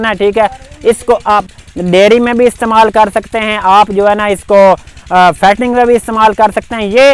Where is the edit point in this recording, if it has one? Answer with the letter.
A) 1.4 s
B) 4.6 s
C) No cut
C